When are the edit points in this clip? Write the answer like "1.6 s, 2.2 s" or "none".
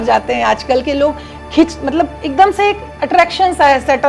none